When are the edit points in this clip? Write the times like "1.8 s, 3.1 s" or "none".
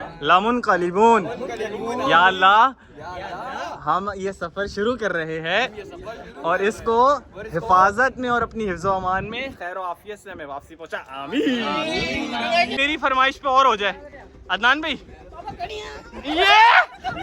12.8 s